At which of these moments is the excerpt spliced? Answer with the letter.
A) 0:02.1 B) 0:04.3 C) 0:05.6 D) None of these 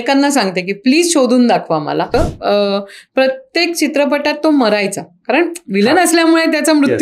A